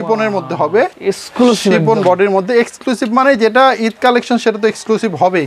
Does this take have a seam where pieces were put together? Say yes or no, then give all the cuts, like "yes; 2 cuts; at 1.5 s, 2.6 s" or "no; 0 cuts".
yes; 1 cut; at 1.0 s